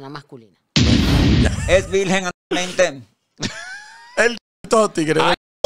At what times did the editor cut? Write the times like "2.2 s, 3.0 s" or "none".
1.5 s